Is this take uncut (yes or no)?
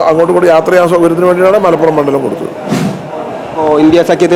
yes